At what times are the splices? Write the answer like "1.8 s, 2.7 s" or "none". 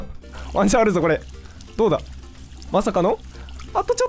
none